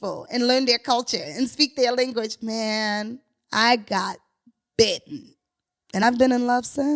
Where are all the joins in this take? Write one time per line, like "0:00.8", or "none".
0:06.0